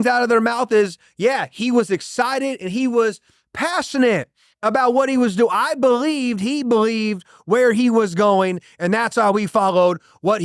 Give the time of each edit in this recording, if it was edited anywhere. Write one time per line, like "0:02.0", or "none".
none

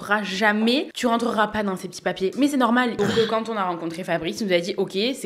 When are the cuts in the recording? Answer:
0:00.9
0:02.9

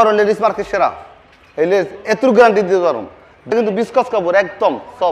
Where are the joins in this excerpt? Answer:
0:03.5

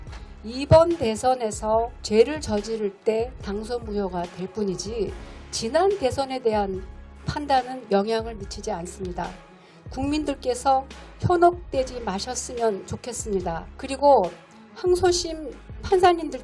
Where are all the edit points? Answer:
0:02.0
0:13.7

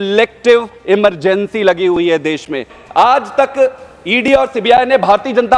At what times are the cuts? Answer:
0:02.7

